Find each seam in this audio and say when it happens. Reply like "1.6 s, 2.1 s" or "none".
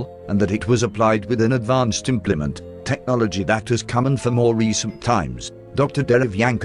none